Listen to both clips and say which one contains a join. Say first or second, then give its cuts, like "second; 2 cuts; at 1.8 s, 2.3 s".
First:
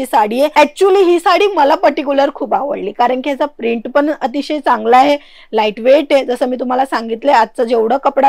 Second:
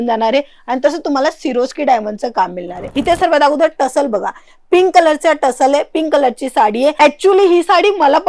second; 1 cut; at 2.9 s